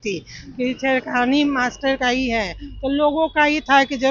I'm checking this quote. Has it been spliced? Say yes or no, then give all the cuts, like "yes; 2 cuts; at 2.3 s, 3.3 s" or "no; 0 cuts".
no; 0 cuts